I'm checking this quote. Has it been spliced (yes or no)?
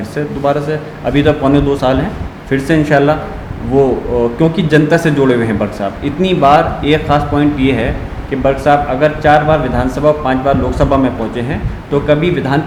no